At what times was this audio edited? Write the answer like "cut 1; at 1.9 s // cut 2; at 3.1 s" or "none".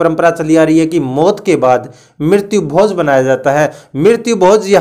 none